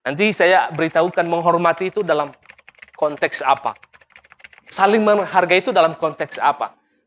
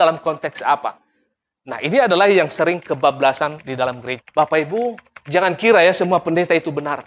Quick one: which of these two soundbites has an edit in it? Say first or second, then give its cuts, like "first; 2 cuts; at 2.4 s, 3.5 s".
second; 1 cut; at 4.3 s